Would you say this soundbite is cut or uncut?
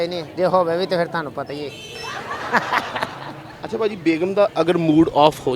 uncut